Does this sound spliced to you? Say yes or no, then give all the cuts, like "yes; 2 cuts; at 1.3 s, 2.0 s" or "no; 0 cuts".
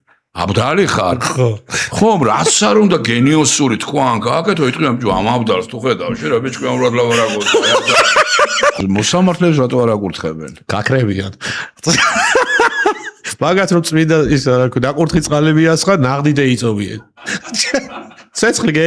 yes; 1 cut; at 8.8 s